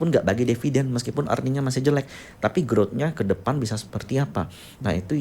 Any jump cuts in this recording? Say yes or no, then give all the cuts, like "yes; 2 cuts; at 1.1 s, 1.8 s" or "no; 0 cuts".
no; 0 cuts